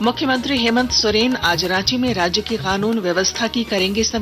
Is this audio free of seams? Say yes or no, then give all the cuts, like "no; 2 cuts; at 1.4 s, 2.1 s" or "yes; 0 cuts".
yes; 0 cuts